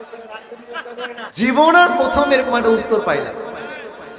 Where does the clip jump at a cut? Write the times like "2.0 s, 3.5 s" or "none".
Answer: 1.3 s